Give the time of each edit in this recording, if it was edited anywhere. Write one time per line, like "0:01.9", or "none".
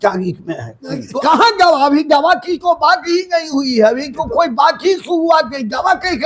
0:01.0